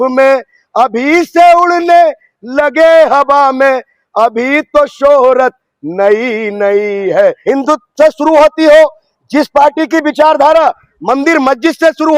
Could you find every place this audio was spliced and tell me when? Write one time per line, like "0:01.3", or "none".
0:07.4